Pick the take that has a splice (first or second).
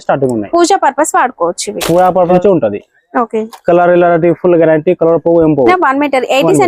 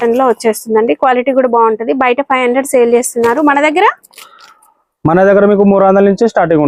first